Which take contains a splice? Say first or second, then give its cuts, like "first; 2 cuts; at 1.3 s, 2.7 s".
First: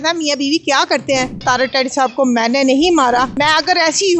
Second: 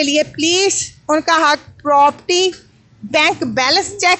first; 2 cuts; at 1.4 s, 3.3 s